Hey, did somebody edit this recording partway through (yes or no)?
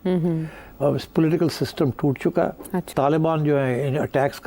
yes